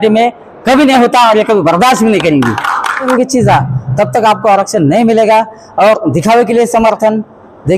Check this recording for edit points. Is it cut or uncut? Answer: cut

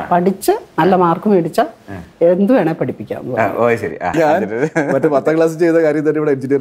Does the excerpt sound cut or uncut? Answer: cut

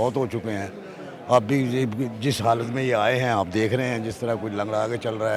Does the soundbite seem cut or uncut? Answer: uncut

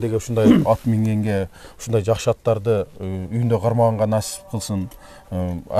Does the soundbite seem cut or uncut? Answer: uncut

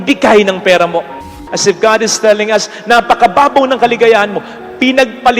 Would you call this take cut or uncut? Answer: cut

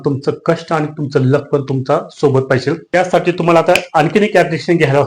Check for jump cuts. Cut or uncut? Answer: cut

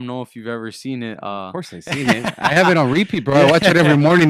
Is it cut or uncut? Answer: uncut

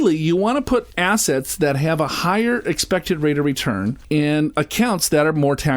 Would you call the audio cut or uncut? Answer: cut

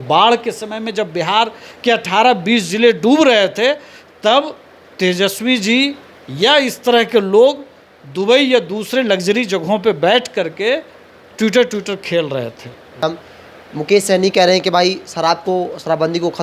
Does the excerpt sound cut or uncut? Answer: cut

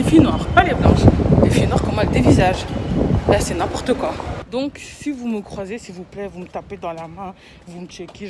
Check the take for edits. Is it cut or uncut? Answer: cut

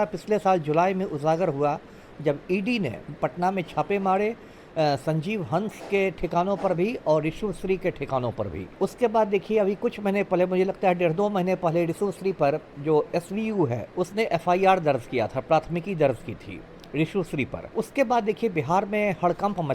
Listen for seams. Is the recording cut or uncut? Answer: cut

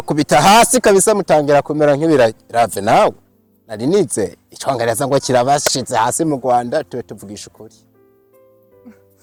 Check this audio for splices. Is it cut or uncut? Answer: uncut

